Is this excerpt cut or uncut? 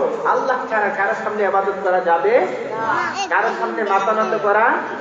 uncut